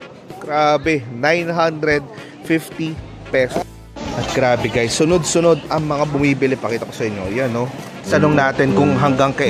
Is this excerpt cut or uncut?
cut